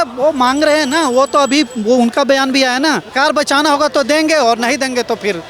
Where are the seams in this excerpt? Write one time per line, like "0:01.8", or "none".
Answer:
0:03.1